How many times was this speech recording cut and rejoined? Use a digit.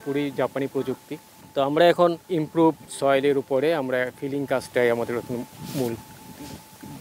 0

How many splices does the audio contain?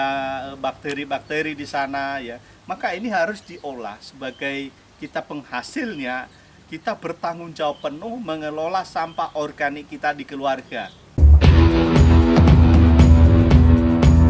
1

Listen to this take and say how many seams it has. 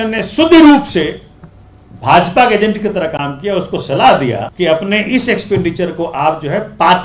1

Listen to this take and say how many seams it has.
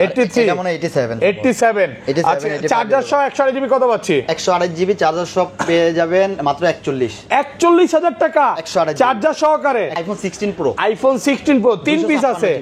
1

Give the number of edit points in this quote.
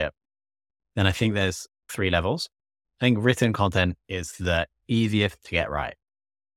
1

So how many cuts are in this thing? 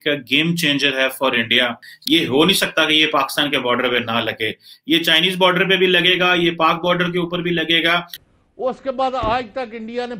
2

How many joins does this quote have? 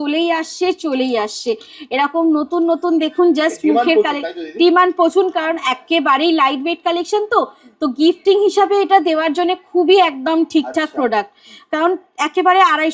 0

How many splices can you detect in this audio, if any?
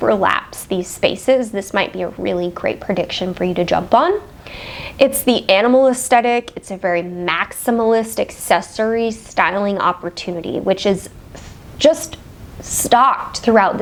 0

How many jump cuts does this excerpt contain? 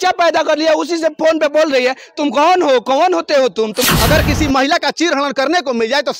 1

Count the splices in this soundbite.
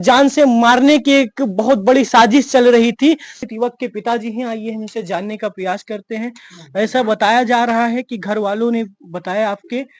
1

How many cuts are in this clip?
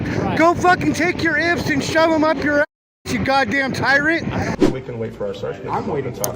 1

